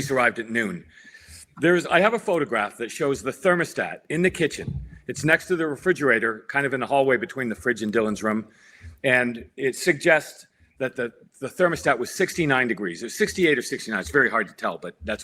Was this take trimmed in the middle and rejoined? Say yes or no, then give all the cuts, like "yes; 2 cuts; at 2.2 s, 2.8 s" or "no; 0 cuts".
yes; 1 cut; at 0.9 s